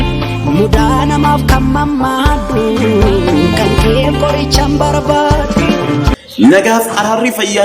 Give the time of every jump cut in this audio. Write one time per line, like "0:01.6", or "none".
0:06.1